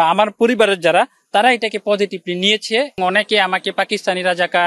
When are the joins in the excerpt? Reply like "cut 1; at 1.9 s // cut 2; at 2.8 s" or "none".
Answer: cut 1; at 3.0 s